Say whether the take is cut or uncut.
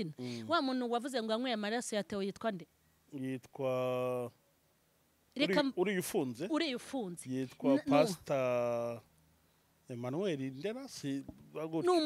uncut